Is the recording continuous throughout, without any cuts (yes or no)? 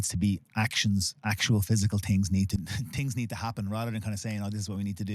no